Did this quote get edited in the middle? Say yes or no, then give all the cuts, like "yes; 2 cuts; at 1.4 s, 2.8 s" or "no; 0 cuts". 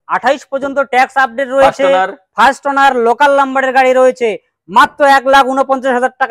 no; 0 cuts